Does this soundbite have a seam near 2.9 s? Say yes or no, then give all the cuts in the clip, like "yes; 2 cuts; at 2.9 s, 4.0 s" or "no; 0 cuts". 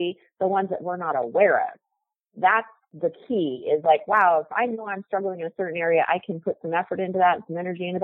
yes; 1 cut; at 2.9 s